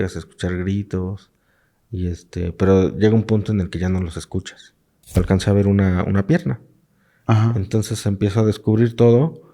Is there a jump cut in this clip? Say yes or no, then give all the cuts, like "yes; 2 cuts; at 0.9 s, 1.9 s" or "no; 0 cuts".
yes; 1 cut; at 5.2 s